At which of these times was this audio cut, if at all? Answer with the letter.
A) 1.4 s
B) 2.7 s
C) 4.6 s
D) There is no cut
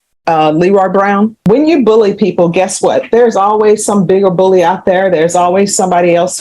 A